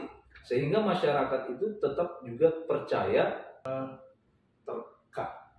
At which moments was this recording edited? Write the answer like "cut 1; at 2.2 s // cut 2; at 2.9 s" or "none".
cut 1; at 3.7 s